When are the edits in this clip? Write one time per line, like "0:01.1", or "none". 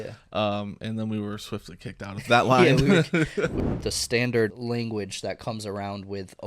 0:03.5
0:04.6